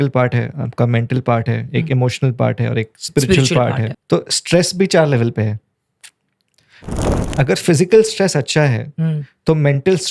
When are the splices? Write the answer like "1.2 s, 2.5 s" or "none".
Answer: 3.9 s, 7.0 s